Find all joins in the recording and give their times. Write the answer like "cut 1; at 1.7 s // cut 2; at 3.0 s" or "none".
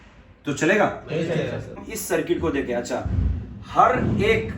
cut 1; at 1.8 s